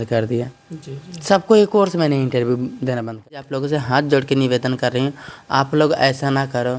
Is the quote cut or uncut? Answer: cut